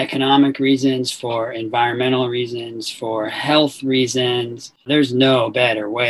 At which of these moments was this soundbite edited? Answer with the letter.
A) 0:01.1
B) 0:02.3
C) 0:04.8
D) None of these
C